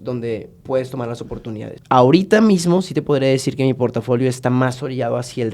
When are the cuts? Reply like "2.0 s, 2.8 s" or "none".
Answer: 1.7 s